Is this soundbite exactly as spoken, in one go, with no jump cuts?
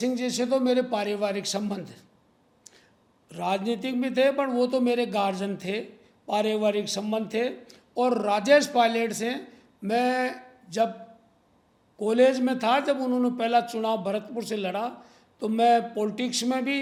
yes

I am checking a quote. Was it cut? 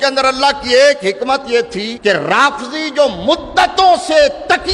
yes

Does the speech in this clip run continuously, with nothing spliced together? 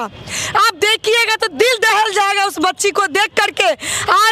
yes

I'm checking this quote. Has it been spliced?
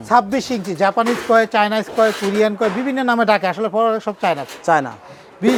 no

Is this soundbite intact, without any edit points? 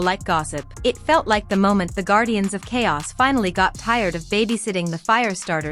yes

